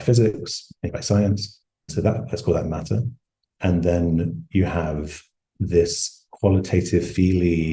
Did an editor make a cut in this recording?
yes; 2 cuts; at 0.9 s, 1.9 s

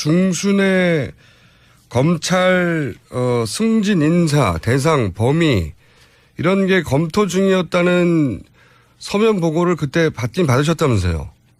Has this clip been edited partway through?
no; 0 cuts

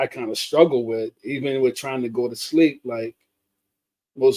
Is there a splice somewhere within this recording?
no; 0 cuts

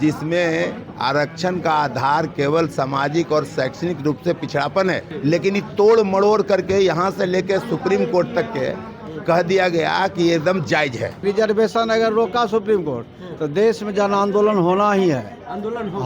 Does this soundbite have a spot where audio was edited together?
yes; 2 cuts; at 5.1 s, 11.2 s

